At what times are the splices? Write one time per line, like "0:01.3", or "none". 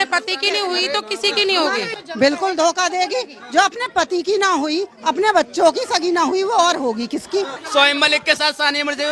0:01.9
0:07.6